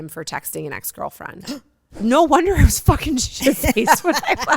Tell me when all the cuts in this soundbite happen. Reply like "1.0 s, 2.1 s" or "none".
2.0 s